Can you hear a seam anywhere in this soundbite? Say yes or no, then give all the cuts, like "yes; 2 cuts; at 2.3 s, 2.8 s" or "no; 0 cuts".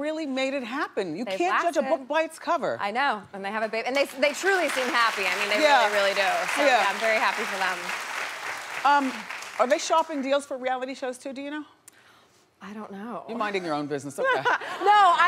yes; 1 cut; at 2.8 s